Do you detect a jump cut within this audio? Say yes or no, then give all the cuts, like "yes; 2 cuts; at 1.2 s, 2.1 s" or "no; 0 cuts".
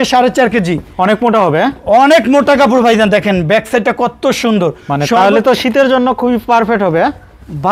no; 0 cuts